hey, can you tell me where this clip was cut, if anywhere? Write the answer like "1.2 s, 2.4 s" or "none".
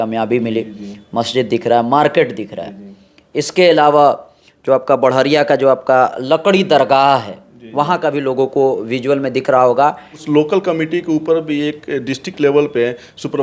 10.1 s

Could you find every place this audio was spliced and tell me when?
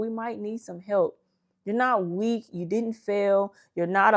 none

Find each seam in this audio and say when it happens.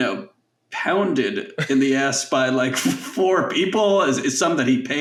none

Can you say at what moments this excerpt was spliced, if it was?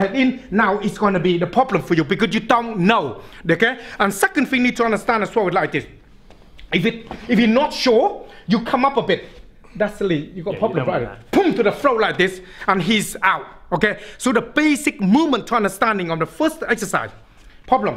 none

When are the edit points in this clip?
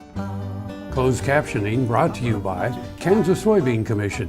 0.9 s

